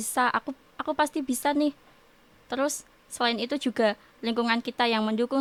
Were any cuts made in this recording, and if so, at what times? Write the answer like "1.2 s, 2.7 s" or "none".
none